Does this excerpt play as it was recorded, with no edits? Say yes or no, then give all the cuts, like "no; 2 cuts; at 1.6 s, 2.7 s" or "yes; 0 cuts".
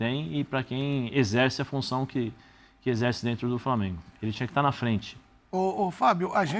yes; 0 cuts